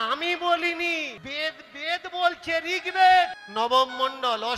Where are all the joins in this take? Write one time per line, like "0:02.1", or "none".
0:01.2
0:03.4